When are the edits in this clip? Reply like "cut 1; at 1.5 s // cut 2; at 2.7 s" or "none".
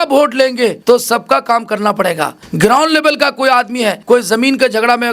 cut 1; at 0.8 s // cut 2; at 2.4 s // cut 3; at 4.0 s